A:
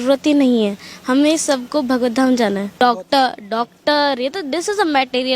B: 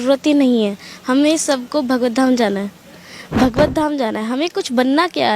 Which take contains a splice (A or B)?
A